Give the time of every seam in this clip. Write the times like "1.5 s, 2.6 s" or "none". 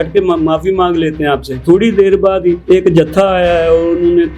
1.6 s, 2.6 s